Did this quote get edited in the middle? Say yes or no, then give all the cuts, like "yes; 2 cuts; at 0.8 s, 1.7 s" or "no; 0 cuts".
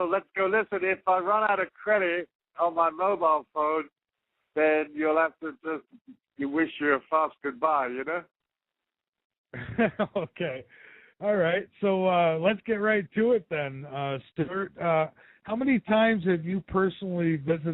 yes; 1 cut; at 14.9 s